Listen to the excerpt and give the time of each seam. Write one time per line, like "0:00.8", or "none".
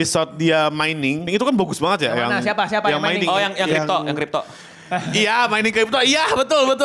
0:01.3